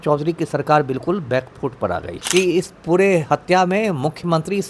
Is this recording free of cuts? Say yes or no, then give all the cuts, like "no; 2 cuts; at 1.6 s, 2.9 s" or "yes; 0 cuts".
no; 1 cut; at 2.1 s